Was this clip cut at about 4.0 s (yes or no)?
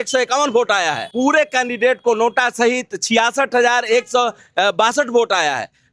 no